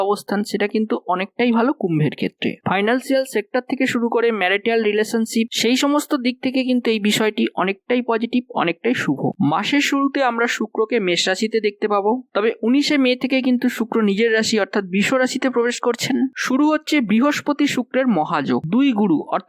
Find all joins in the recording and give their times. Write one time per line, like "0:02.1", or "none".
0:09.3